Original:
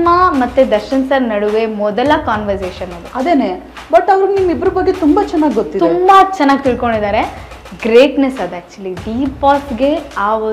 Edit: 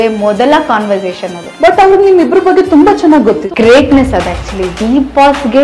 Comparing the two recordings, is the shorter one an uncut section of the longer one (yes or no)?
no